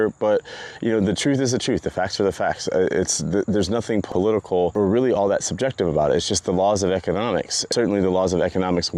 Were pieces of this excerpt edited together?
yes; 1 cut; at 7.6 s

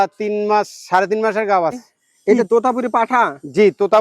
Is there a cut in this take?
yes; 1 cut; at 2.4 s

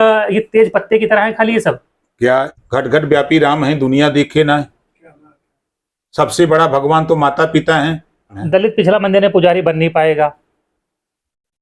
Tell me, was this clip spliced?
yes; 2 cuts; at 2.5 s, 8.4 s

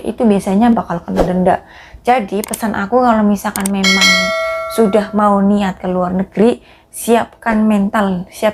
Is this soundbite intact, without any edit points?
yes; 0 cuts

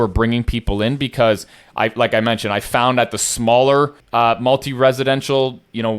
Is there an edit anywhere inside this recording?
yes; 1 cut; at 4.0 s

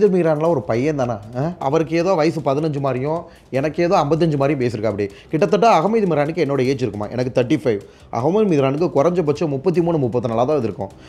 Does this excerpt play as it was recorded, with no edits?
no; 1 cut; at 1.6 s

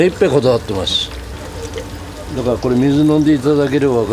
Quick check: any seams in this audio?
yes; 1 cut; at 1.3 s

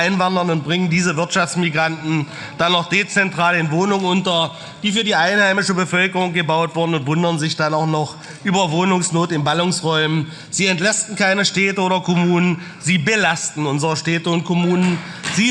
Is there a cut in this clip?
no; 0 cuts

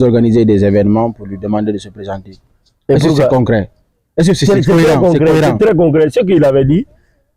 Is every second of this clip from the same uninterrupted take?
yes; 0 cuts

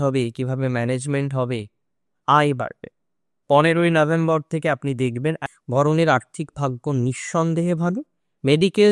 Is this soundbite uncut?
no; 1 cut; at 5.5 s

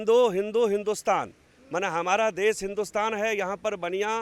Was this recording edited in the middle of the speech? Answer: no; 0 cuts

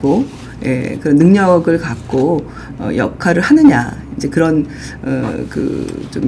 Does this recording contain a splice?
no; 0 cuts

